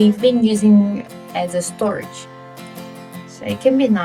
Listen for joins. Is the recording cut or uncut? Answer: uncut